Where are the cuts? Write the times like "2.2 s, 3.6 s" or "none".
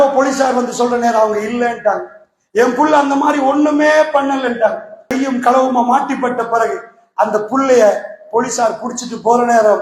5.0 s